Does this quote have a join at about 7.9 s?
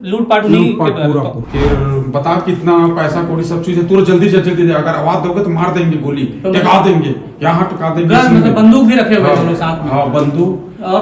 no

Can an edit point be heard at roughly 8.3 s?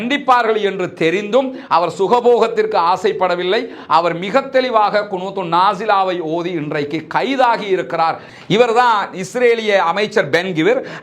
yes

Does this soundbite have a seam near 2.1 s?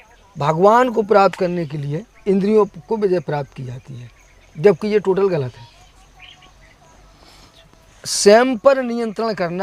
yes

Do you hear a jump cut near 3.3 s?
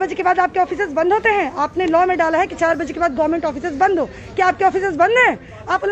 no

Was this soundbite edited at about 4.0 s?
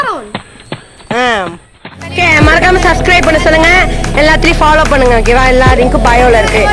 no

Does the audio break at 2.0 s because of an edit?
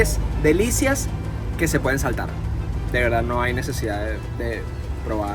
no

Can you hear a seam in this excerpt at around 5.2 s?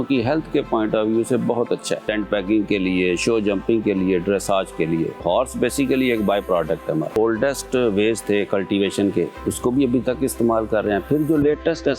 yes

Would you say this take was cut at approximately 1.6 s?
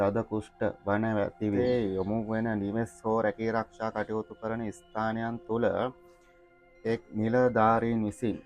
yes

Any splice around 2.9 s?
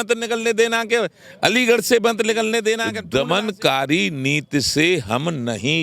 yes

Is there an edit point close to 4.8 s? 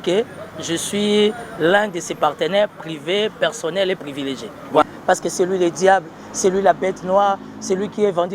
yes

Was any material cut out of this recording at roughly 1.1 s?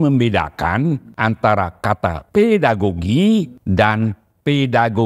yes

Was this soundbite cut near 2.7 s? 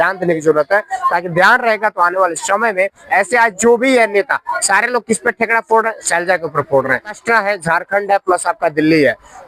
no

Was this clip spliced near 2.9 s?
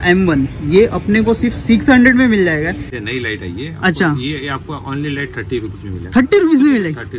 yes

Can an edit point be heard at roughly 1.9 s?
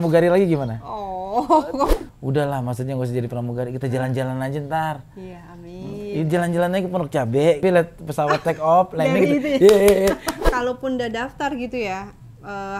yes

